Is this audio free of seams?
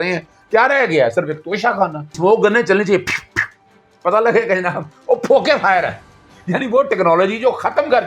no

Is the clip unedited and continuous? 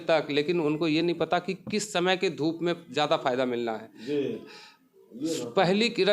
yes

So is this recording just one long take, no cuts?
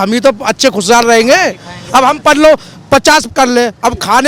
yes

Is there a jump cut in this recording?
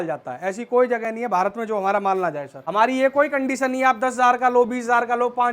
yes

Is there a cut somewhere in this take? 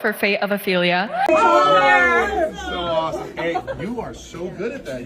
yes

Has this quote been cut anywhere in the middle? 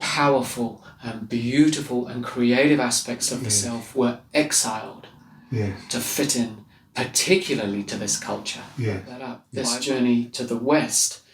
yes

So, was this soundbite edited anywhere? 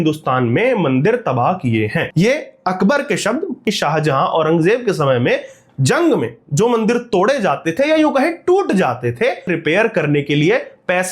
yes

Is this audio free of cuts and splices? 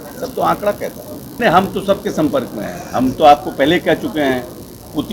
no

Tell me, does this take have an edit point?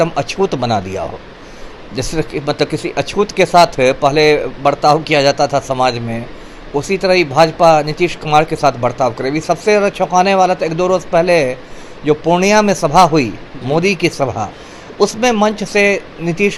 no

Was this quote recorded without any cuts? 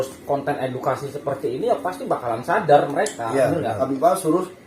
no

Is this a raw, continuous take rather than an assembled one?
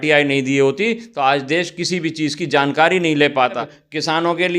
no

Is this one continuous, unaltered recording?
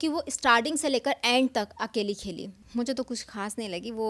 no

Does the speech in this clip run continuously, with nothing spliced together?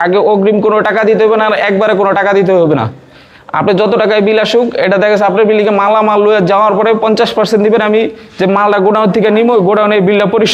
yes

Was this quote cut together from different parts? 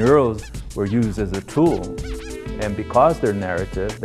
no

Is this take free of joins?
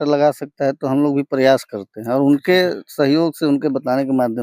yes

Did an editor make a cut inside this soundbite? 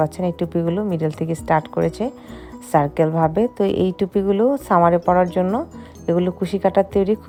no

